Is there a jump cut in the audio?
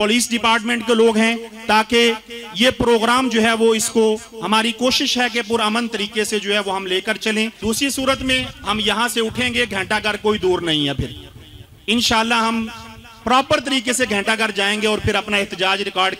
yes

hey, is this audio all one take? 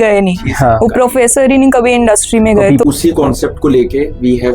no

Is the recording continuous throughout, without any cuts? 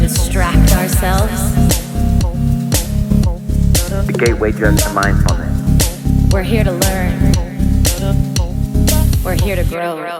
yes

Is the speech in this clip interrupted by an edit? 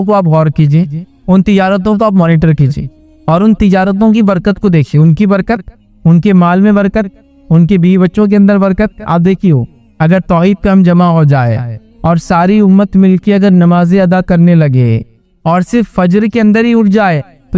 yes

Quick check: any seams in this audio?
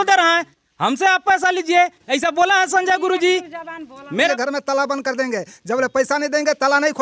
yes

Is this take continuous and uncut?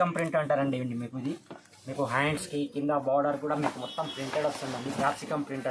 yes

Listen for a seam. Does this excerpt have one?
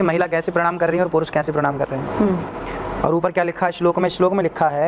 no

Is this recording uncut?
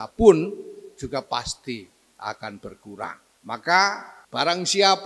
no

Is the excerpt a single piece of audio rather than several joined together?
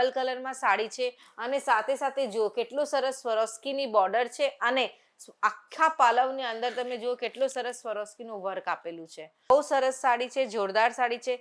no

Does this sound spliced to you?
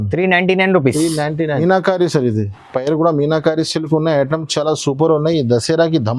yes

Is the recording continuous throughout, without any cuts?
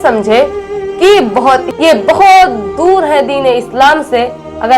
no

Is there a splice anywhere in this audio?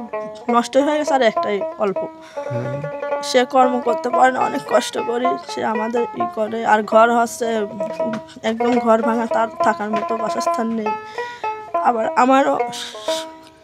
no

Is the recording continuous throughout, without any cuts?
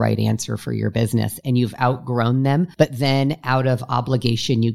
no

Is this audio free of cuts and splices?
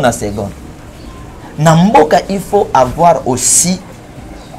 yes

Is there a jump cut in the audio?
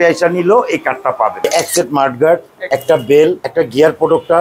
yes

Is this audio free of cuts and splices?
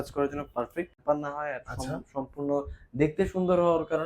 no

